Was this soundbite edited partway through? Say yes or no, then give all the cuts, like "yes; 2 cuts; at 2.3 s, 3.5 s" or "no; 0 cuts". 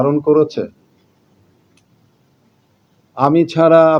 no; 0 cuts